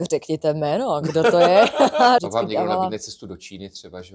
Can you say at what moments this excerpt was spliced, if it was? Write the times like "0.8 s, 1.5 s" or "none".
2.2 s